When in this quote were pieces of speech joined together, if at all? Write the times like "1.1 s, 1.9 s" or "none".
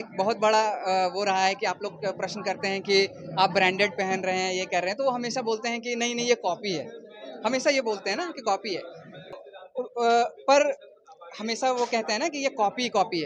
9.4 s

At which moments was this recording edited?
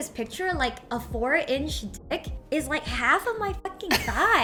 none

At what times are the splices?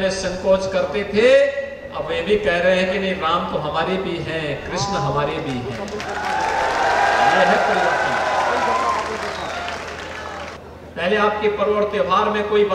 10.6 s

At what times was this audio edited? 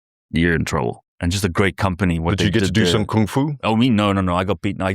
1.1 s

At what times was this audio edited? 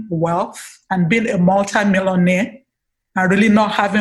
none

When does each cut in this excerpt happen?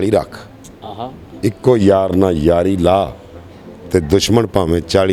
none

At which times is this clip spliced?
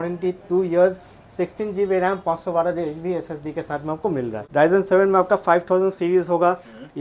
4.4 s

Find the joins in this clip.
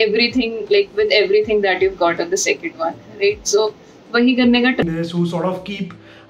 4.8 s

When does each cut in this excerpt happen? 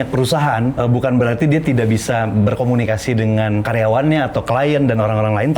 0.7 s, 3.7 s

